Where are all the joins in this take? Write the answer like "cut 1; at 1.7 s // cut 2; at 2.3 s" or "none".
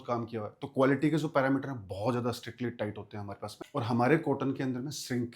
cut 1; at 3.6 s

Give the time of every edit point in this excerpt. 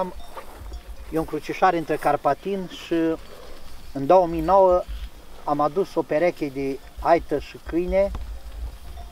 none

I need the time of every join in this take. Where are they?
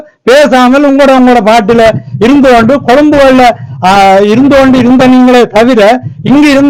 none

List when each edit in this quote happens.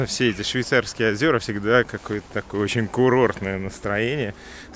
none

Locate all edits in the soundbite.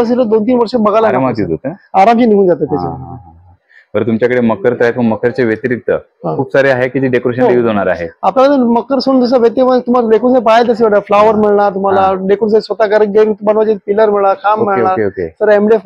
none

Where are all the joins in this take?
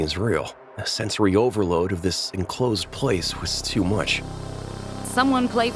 cut 1; at 4.8 s

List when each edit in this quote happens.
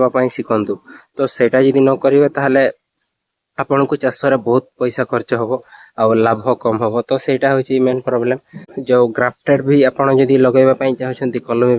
cut 1; at 8.7 s

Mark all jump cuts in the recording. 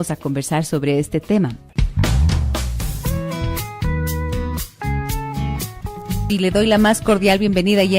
cut 1; at 7.0 s

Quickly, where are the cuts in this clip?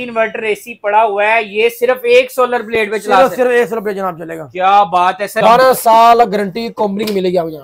cut 1; at 5.4 s

